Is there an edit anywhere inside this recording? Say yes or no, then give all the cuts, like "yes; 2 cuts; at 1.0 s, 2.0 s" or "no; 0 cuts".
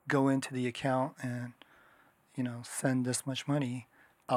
no; 0 cuts